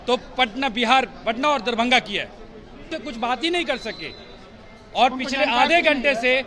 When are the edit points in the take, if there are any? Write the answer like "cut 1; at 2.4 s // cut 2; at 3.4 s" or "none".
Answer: cut 1; at 3.0 s